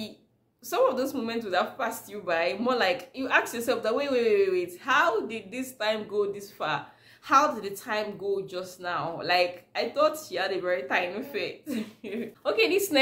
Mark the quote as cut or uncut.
uncut